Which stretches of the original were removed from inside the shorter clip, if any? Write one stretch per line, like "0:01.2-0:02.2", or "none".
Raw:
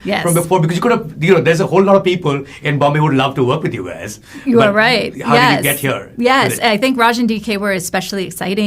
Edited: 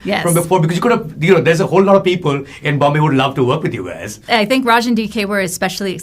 0:04.2-0:06.5